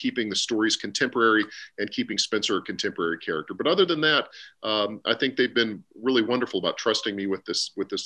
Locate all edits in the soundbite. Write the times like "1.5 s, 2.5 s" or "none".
none